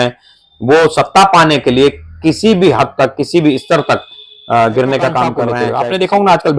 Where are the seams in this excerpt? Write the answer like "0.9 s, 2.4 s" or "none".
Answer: 5.5 s